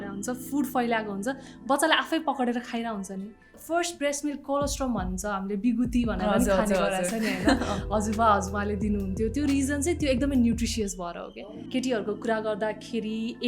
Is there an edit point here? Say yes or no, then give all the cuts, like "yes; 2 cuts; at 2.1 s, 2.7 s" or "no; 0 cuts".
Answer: yes; 2 cuts; at 3.6 s, 11.4 s